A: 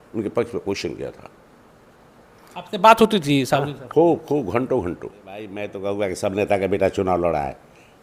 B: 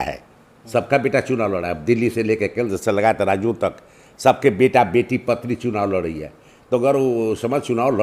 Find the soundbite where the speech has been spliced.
A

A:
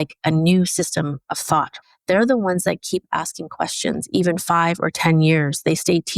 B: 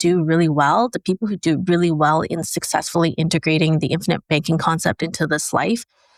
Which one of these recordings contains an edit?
A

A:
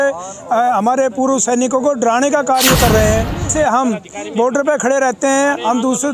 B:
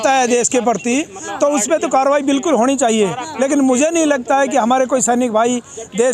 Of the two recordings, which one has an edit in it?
A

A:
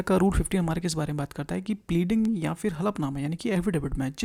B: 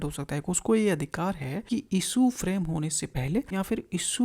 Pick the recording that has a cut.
B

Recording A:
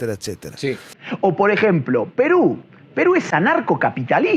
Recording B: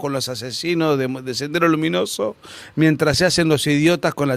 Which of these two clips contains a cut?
A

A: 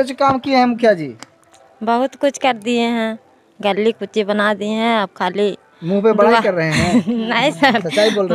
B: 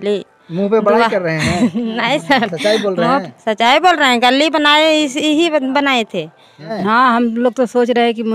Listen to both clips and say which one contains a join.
B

